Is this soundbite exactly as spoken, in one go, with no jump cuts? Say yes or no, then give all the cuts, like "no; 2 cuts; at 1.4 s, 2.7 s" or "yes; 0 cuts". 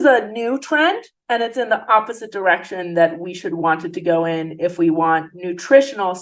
yes; 0 cuts